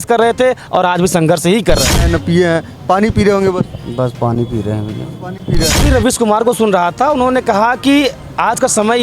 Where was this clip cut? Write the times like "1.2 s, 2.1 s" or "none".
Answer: 2.0 s, 5.9 s